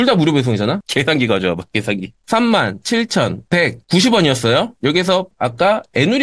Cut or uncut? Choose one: cut